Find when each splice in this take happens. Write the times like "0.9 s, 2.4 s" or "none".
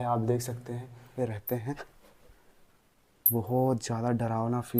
1.1 s